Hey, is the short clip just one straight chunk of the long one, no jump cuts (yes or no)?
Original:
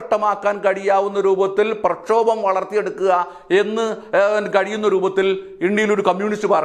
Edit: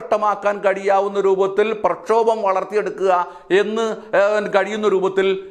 yes